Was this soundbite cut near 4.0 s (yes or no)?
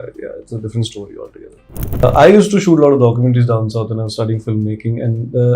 no